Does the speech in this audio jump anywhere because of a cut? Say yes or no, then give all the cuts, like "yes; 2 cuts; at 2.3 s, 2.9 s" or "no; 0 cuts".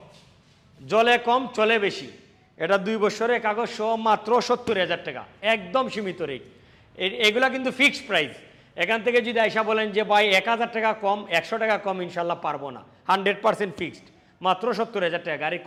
no; 0 cuts